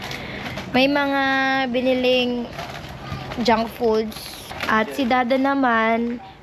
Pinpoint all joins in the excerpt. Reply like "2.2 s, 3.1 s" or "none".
4.5 s